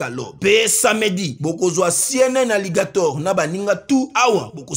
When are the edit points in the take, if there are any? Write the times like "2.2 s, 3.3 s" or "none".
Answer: none